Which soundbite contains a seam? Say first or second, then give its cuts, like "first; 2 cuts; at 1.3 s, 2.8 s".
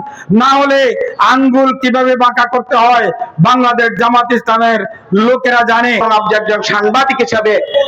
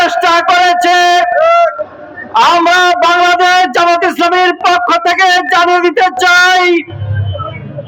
first; 1 cut; at 6.0 s